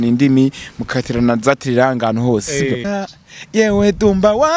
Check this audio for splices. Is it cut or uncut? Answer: cut